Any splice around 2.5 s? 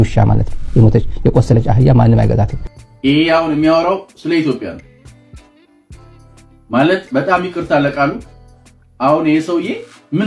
no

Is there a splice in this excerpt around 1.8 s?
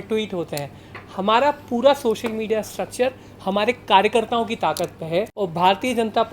no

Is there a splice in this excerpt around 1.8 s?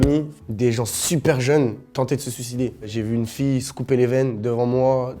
yes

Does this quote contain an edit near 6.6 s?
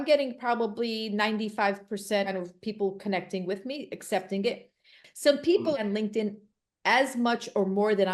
no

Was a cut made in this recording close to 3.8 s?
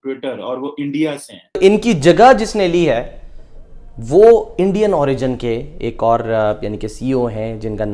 no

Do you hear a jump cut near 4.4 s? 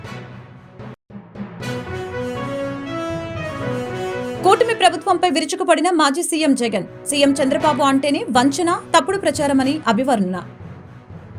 yes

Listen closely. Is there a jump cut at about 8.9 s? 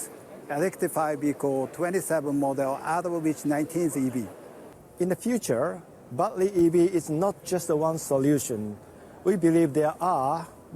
no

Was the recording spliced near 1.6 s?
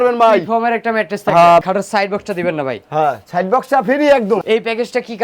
yes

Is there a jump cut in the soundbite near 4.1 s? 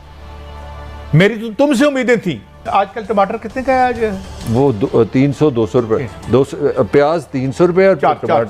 no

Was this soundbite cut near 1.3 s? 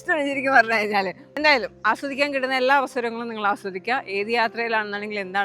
yes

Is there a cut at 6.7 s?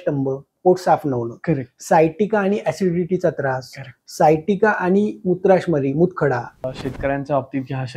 yes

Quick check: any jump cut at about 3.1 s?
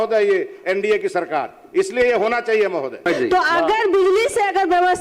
yes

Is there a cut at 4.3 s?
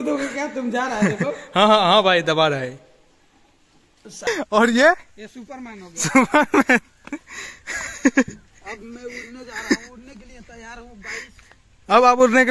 yes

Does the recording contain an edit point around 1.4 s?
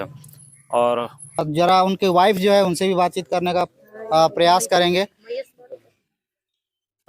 yes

